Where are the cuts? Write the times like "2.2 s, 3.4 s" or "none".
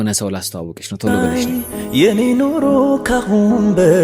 1.2 s